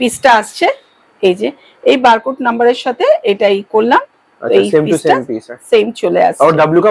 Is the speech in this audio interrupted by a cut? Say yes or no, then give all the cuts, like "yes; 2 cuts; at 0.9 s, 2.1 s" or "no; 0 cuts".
no; 0 cuts